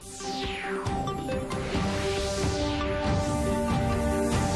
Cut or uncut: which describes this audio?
uncut